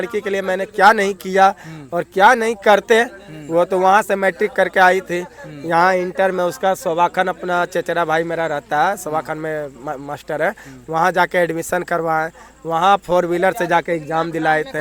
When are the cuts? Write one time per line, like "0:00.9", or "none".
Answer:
none